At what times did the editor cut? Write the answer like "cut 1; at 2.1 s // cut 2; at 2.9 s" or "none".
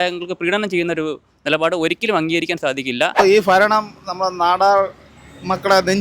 cut 1; at 3.2 s

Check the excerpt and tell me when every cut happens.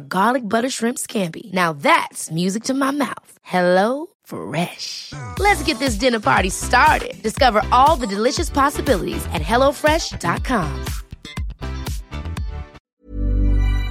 cut 1; at 12.8 s

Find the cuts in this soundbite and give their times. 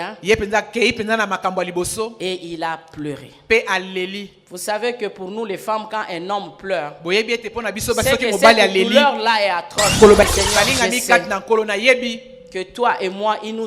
cut 1; at 10.2 s

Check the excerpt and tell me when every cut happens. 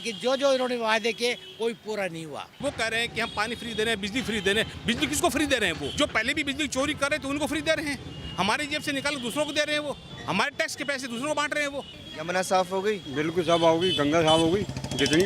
cut 1; at 2.6 s // cut 2; at 5.9 s // cut 3; at 10.1 s // cut 4; at 12.0 s

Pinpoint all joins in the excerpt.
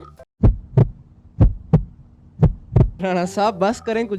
cut 1; at 2.9 s

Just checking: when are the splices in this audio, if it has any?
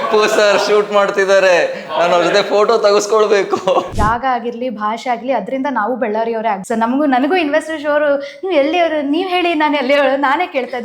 cut 1; at 3.9 s // cut 2; at 6.6 s

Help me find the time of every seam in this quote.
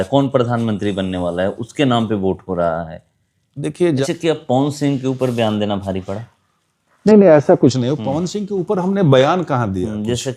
cut 1; at 4.0 s

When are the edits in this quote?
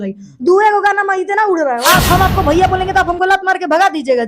cut 1; at 1.8 s

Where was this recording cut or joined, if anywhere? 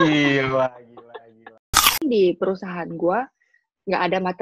cut 1; at 2.0 s

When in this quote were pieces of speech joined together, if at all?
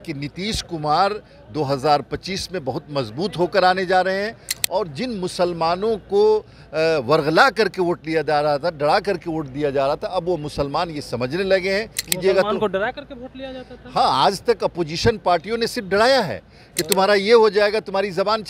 cut 1; at 12.1 s

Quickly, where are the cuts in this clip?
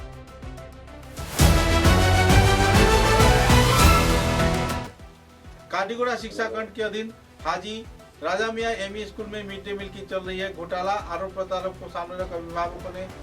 cut 1; at 1.2 s

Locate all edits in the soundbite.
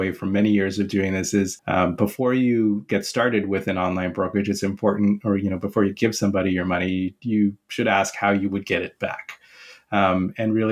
cut 1; at 1.6 s // cut 2; at 7.2 s

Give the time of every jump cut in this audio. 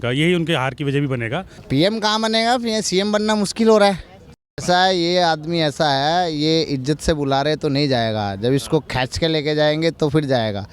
cut 1; at 1.5 s // cut 2; at 4.5 s

